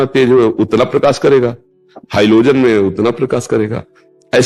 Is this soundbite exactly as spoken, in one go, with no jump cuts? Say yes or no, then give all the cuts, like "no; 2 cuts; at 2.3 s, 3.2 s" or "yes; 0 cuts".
yes; 0 cuts